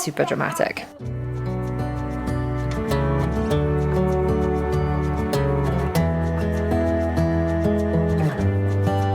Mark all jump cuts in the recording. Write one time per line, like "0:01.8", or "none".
none